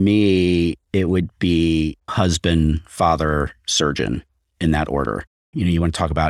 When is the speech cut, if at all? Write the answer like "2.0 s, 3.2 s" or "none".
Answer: 2.1 s, 5.4 s